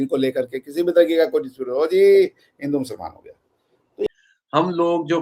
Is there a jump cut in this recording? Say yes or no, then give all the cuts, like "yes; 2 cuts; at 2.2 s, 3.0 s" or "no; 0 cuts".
yes; 1 cut; at 4.1 s